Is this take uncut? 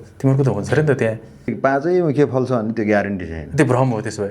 no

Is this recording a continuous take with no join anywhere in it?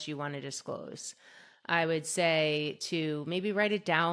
yes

